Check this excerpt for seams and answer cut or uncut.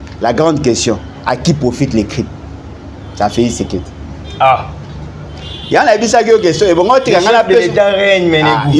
uncut